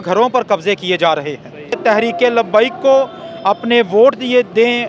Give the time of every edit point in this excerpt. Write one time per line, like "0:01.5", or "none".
0:01.8